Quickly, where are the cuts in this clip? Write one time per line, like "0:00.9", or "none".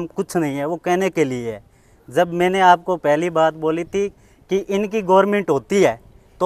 none